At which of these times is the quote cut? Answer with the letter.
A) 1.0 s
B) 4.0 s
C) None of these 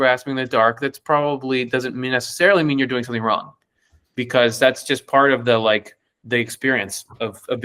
C